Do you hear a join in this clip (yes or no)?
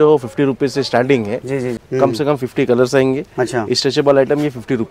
yes